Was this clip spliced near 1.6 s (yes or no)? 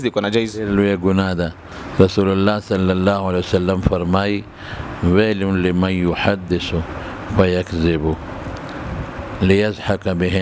no